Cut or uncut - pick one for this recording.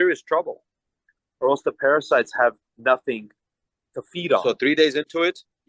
cut